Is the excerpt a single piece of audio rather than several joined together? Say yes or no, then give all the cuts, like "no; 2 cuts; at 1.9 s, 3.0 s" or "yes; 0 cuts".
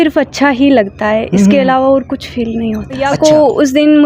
no; 1 cut; at 3.1 s